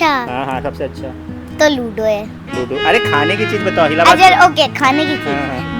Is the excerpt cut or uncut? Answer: uncut